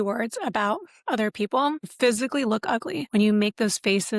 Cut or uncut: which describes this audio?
cut